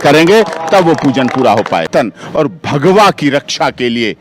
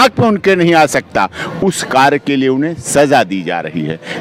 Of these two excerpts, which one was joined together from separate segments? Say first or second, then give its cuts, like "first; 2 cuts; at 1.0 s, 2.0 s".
first; 1 cut; at 1.9 s